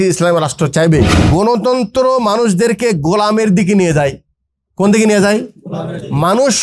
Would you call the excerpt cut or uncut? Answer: cut